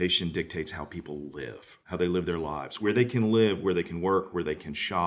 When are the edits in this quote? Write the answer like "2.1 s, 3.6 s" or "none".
1.8 s, 2.8 s